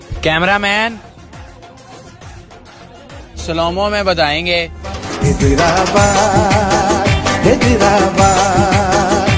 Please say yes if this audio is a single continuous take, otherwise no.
yes